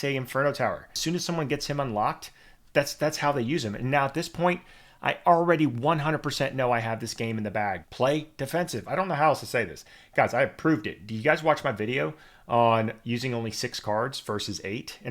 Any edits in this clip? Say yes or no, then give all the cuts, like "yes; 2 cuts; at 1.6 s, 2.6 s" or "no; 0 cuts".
yes; 2 cuts; at 1.0 s, 7.8 s